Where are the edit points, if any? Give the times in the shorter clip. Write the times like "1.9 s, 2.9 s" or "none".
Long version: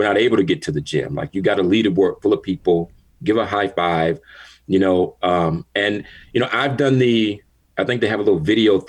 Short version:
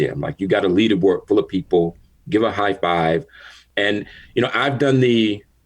3.6 s